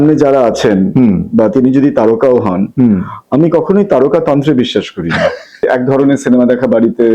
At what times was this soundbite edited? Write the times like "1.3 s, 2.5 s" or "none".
5.6 s